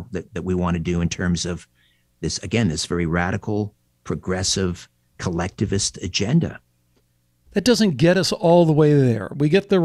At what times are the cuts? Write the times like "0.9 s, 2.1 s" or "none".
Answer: 7.5 s